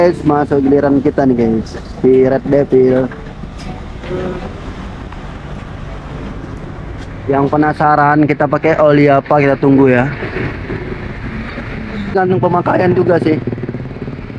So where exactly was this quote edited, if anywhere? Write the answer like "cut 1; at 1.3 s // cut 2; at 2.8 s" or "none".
cut 1; at 12.1 s